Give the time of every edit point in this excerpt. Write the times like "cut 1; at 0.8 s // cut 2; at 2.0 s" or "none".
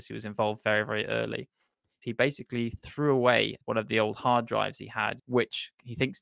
cut 1; at 2.0 s // cut 2; at 3.6 s // cut 3; at 5.2 s

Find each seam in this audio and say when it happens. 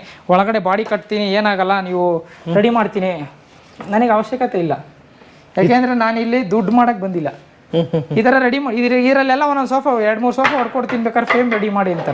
none

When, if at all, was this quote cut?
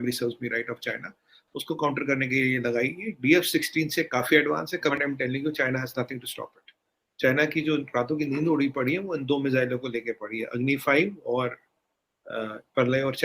cut 1; at 4.9 s

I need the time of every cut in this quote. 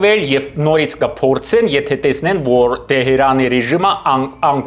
none

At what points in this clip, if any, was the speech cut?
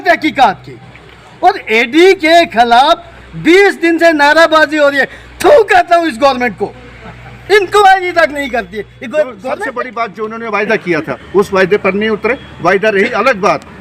cut 1; at 9.8 s

